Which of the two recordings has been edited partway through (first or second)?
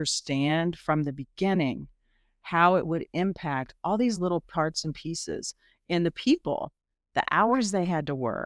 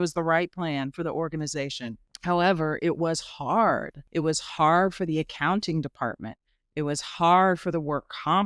second